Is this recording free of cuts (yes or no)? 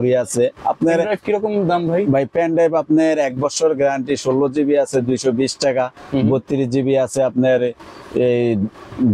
yes